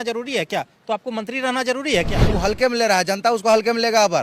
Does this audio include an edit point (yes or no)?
yes